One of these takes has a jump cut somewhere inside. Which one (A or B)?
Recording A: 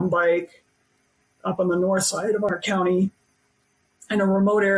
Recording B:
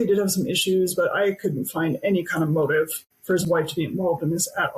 B